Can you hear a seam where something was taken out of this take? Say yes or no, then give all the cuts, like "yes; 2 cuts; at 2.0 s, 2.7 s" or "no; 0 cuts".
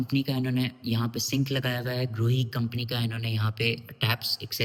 no; 0 cuts